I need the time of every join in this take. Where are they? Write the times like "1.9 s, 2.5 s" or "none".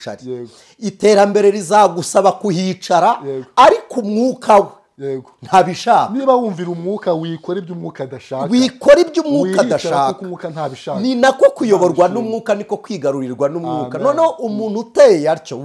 none